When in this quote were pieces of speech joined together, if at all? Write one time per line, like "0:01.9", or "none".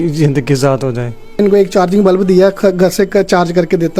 0:01.4